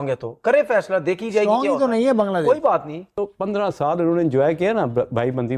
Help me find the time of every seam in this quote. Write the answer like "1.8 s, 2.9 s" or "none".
3.2 s